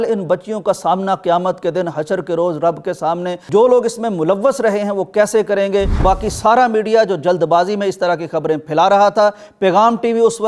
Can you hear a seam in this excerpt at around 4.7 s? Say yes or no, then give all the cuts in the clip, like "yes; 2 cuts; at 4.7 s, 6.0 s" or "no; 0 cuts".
no; 2 cuts; at 3.4 s, 6.0 s